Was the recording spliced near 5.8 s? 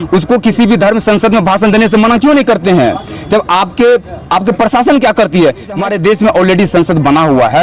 yes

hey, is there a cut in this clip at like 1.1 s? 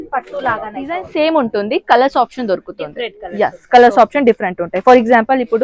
yes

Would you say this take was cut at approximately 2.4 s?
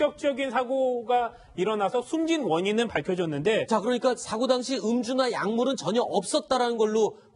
yes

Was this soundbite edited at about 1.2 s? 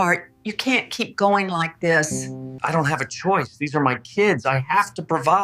no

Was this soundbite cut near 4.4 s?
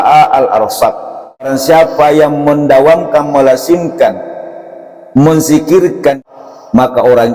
no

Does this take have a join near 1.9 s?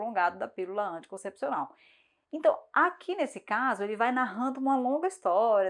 no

